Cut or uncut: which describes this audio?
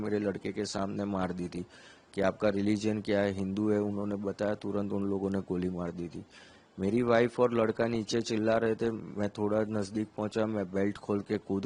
uncut